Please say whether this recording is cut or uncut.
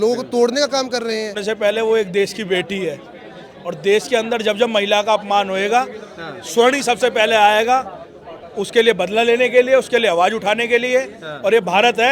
cut